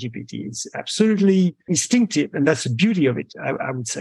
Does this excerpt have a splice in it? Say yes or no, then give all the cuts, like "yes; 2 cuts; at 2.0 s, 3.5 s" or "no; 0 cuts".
yes; 1 cut; at 1.8 s